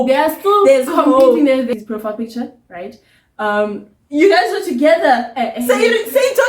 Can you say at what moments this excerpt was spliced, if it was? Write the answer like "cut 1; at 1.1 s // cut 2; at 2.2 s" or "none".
cut 1; at 1.7 s